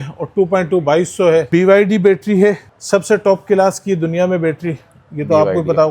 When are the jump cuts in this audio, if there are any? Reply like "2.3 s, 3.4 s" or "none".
1.5 s, 2.7 s